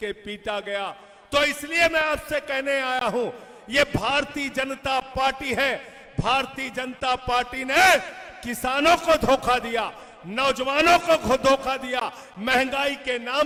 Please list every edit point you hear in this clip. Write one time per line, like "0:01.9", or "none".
none